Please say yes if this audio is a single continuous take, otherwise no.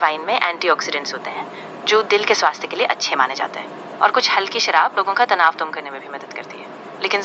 yes